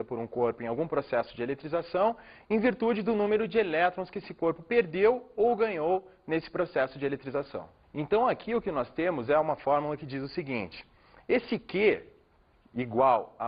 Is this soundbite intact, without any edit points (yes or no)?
no